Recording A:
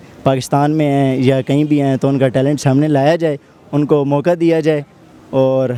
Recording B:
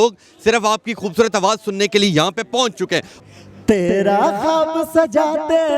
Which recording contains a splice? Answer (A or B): B